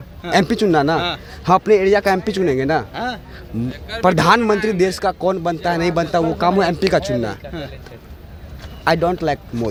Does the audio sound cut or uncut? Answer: uncut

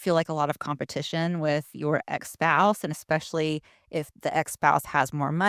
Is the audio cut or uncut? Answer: uncut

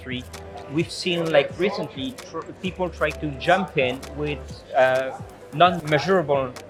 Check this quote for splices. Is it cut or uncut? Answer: uncut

